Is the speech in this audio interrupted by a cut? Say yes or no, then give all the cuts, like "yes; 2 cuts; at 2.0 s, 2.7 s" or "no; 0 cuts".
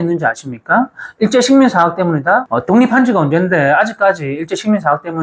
yes; 1 cut; at 2.5 s